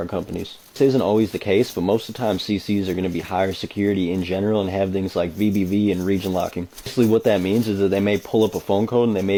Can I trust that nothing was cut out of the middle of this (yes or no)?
yes